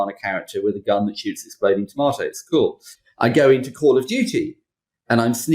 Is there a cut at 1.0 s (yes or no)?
no